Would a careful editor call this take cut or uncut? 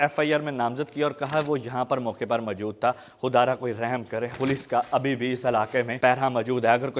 cut